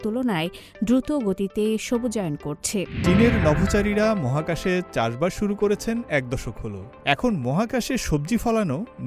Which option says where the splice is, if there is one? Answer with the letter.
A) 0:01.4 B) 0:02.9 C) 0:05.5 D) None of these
B